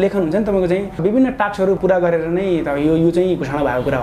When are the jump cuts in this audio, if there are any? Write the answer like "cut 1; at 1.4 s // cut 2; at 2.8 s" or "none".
cut 1; at 1.0 s // cut 2; at 1.8 s